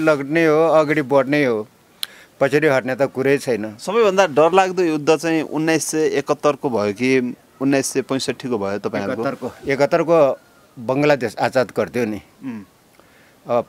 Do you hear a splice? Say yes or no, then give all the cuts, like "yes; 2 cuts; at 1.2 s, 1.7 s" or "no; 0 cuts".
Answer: no; 0 cuts